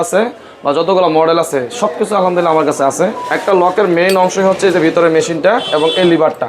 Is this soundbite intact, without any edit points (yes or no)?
no